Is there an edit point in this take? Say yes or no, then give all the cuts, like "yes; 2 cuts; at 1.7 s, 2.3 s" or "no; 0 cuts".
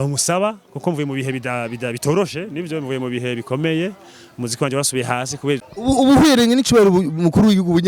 yes; 1 cut; at 5.6 s